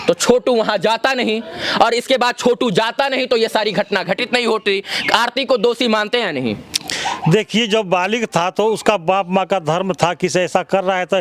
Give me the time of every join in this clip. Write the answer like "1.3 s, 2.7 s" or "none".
none